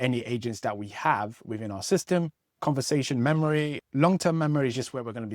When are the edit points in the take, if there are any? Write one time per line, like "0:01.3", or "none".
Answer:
0:03.8